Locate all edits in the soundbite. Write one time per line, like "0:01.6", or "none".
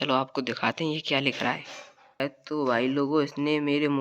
0:02.2

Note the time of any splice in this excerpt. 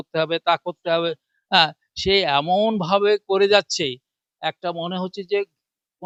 none

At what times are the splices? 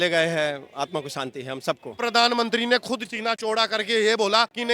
0:02.0
0:03.3

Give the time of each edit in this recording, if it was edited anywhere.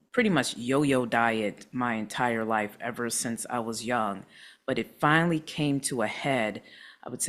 none

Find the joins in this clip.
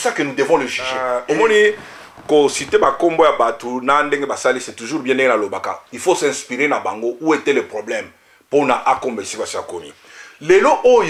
0:01.1

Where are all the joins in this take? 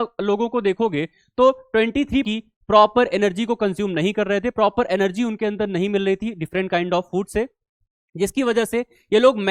0:02.2

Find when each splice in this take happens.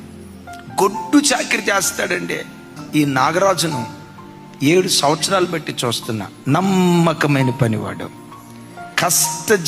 0:04.9

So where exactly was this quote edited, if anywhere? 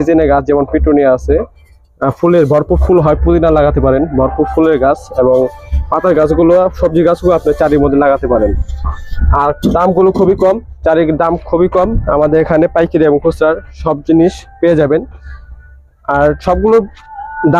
none

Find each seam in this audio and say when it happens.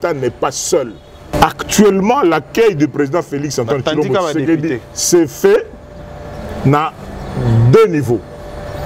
0:01.3

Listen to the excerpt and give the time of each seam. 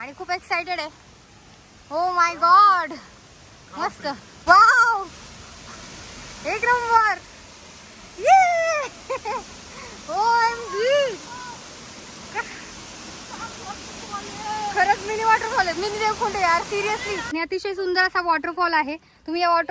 0:04.3
0:17.2

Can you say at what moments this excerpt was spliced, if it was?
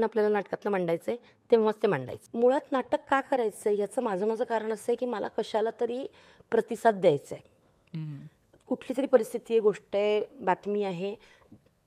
0:02.1

